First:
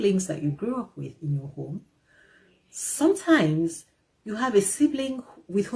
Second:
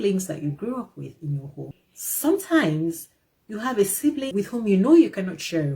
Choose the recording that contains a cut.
second; 2 cuts; at 1.7 s, 4.3 s

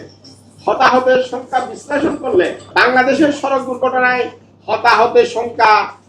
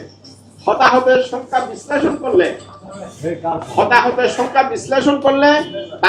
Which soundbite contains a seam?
first; 1 cut; at 2.6 s

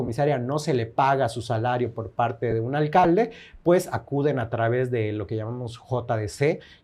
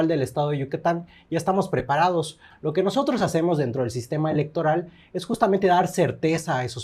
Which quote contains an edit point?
second; 1 cut; at 2.4 s

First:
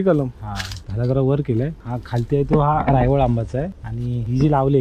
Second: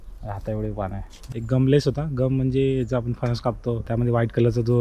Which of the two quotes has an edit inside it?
second; 1 cut; at 1.2 s

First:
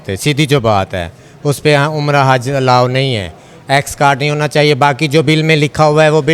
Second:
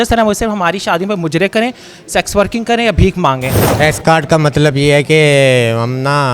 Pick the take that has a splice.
second; 1 cut; at 3.8 s

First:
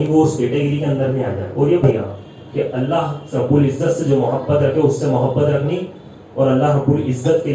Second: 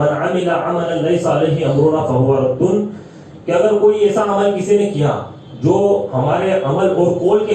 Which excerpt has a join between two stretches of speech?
first; 1 cut; at 1.9 s

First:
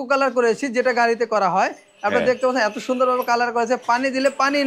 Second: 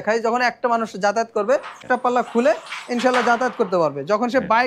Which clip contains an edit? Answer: second; 1 cut; at 1.8 s

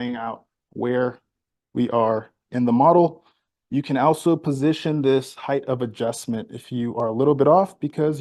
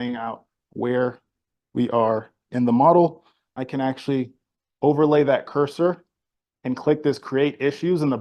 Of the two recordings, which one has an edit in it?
second; 1 cut; at 3.6 s

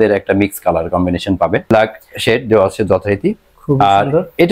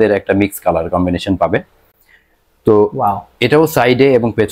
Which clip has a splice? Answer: first; 1 cut; at 1.7 s

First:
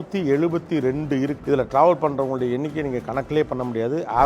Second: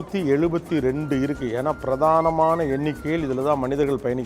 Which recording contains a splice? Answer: first; 1 cut; at 1.4 s

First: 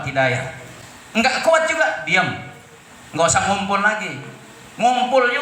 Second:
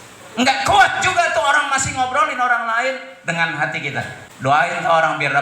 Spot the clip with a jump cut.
second; 1 cut; at 4.2 s

